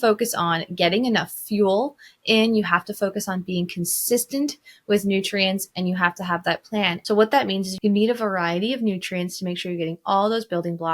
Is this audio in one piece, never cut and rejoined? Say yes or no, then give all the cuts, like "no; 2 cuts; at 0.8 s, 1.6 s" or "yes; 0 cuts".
no; 2 cuts; at 7.0 s, 7.7 s